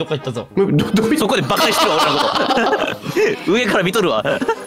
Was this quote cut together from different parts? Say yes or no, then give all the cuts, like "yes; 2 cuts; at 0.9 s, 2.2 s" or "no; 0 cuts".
no; 0 cuts